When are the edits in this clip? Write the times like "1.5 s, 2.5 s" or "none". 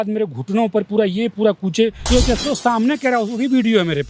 2.0 s